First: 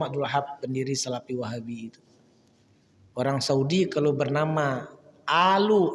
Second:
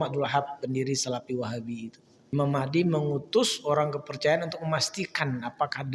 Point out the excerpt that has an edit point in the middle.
second; 1 cut; at 2.3 s

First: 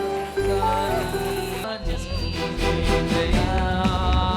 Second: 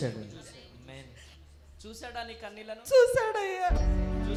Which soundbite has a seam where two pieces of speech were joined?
first; 1 cut; at 1.6 s

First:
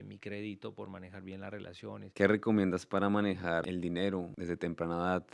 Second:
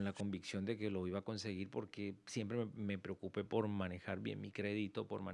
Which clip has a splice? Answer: first; 3 cuts; at 2.0 s, 3.6 s, 4.3 s

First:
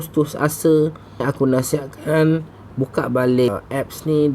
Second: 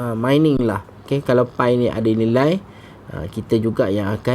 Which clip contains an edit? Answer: second; 1 cut; at 1.0 s

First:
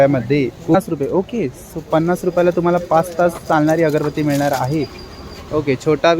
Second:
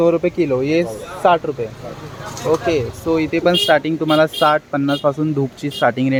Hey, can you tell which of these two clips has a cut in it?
first; 2 cuts; at 0.7 s, 5.3 s

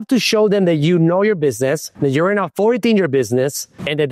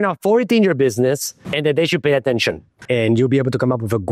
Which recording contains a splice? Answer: second; 1 cut; at 2.7 s

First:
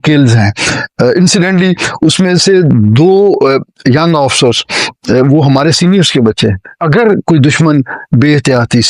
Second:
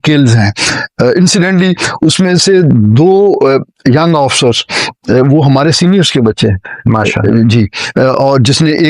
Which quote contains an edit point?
first; 1 cut; at 6.8 s

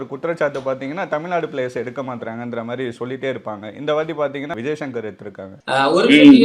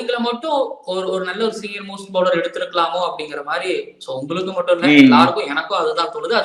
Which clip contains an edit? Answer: first; 2 cuts; at 4.5 s, 5.5 s

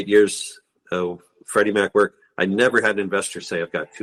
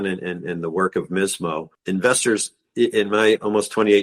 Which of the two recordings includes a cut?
second; 1 cut; at 1.7 s

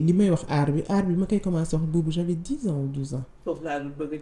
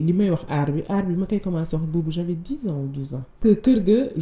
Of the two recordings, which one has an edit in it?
second; 1 cut; at 3.3 s

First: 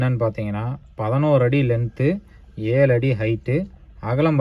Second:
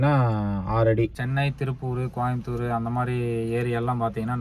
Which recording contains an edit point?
second; 1 cut; at 1.2 s

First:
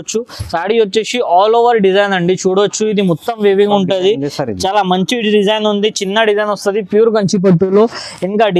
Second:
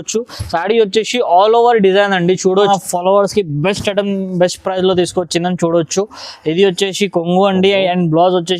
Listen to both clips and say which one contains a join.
second; 1 cut; at 2.7 s

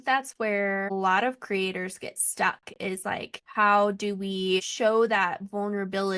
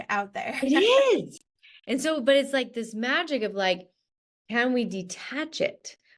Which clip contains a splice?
first; 3 cuts; at 0.9 s, 3.4 s, 4.7 s

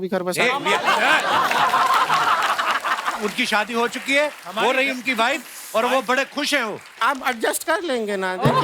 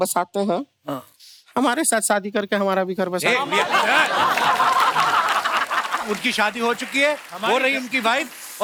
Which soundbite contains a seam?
first; 1 cut; at 6.8 s

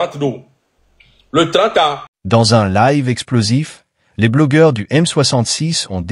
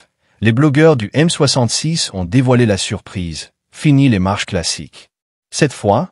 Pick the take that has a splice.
first; 1 cut; at 2.1 s

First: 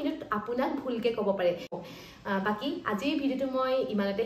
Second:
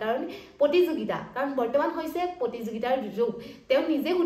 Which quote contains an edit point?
first; 1 cut; at 1.7 s

